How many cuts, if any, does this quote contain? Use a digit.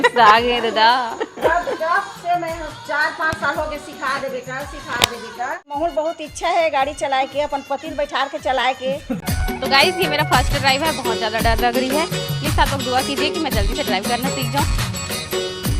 2